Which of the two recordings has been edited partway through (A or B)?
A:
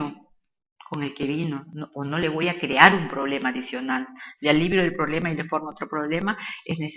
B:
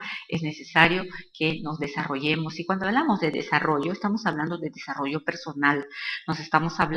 B